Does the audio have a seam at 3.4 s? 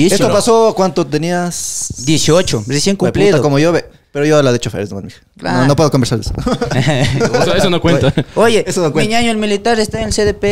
no; 0 cuts

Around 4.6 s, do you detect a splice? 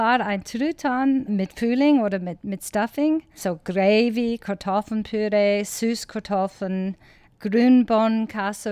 no; 3 cuts; at 1.3 s, 3.3 s, 7.3 s

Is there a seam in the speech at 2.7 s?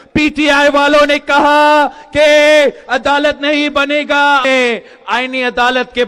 no; 1 cut; at 4.4 s

